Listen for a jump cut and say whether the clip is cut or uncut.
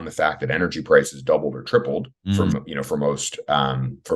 cut